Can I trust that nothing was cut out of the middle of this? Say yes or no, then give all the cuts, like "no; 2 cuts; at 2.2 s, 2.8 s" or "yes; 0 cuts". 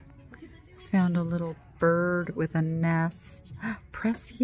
yes; 0 cuts